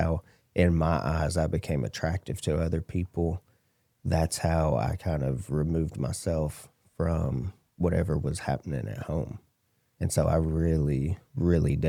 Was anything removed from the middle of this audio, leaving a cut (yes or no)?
no